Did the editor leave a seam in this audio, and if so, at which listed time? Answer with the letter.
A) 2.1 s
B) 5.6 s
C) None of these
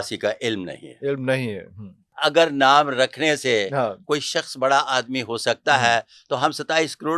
A